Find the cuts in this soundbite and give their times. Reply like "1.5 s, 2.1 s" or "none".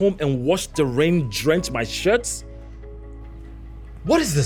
none